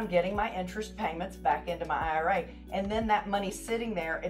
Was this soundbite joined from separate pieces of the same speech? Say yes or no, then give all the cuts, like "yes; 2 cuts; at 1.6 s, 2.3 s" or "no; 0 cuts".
no; 0 cuts